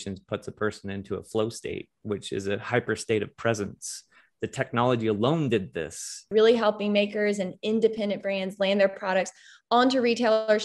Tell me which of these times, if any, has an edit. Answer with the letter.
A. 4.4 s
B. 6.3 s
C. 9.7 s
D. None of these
B